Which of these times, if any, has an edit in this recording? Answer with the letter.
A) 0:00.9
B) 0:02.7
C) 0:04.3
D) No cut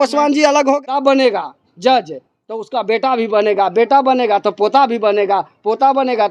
A